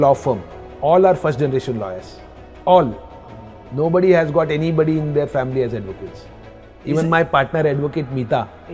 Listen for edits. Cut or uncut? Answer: cut